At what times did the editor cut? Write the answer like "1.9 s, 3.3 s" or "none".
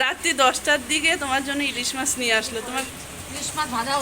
2.9 s